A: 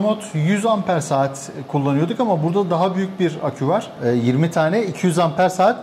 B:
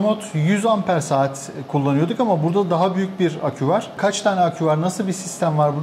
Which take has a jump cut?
A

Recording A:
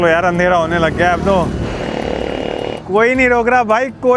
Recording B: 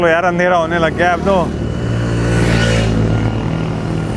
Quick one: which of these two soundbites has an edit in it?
A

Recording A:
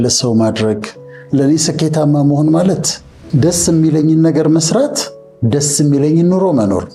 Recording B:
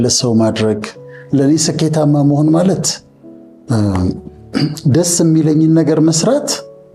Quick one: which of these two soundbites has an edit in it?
A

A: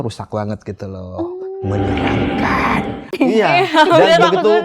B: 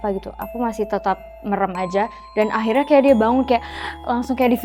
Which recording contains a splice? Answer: A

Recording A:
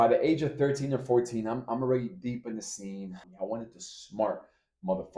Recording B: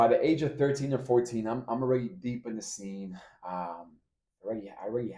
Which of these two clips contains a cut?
A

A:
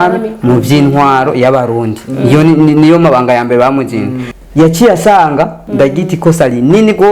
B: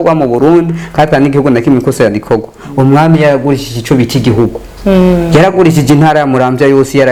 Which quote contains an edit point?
A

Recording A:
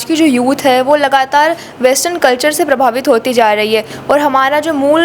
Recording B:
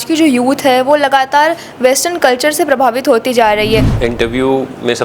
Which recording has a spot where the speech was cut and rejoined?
B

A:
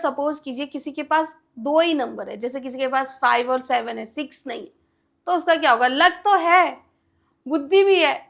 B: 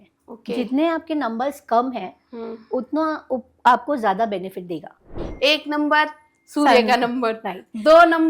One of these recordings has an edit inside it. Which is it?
B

